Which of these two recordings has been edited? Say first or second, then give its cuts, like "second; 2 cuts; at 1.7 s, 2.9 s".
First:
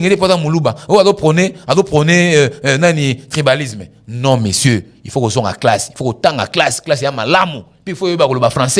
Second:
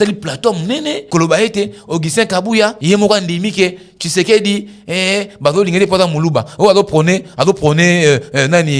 second; 2 cuts; at 1.0 s, 2.8 s